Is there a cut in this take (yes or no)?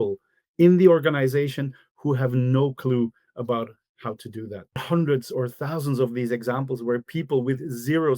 yes